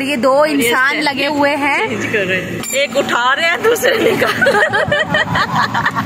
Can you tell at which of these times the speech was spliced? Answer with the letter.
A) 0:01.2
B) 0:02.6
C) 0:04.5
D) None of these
B